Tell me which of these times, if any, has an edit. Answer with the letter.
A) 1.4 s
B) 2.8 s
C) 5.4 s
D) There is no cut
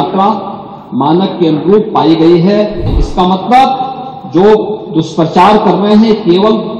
B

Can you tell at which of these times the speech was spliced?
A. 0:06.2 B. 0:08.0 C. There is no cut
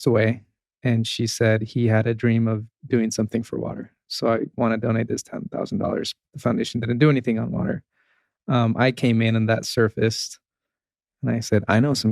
C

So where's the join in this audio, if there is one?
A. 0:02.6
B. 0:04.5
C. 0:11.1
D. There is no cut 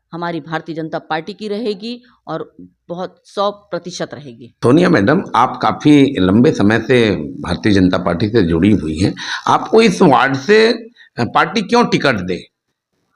B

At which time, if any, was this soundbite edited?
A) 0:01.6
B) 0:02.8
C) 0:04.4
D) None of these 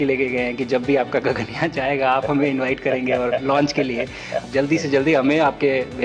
C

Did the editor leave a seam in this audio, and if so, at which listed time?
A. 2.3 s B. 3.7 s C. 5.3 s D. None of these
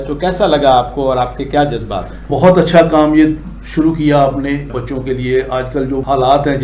A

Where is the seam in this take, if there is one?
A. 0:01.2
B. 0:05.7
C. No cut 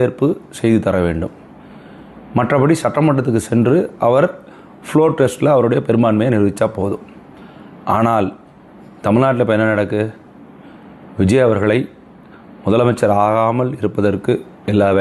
B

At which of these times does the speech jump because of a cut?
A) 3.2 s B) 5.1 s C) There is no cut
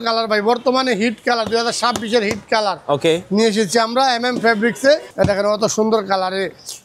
B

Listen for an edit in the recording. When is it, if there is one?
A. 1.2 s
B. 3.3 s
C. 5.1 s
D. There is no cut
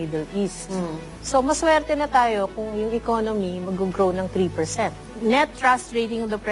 C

